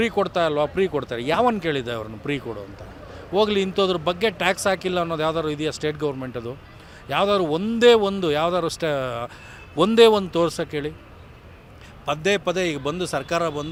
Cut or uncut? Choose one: uncut